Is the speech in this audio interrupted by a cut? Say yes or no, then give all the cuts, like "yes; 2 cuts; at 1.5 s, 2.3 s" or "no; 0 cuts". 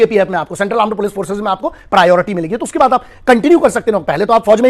no; 0 cuts